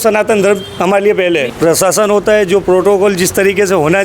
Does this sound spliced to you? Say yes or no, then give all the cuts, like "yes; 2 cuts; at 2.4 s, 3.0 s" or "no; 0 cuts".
yes; 1 cut; at 1.5 s